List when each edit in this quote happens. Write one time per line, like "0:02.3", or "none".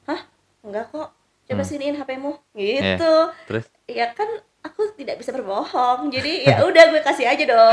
none